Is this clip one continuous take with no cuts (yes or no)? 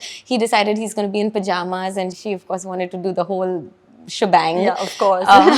no